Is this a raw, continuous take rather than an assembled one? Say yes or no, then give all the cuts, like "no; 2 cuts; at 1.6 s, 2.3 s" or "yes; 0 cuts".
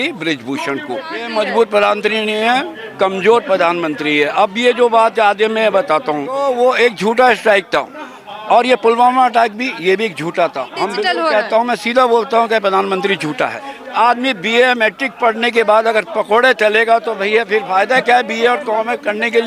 no; 4 cuts; at 1.2 s, 6.4 s, 10.9 s, 13.7 s